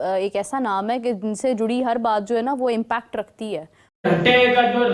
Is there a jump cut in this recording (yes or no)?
yes